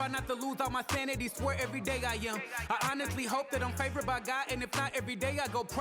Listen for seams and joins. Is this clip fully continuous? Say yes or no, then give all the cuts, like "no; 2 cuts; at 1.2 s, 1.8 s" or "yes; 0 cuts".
yes; 0 cuts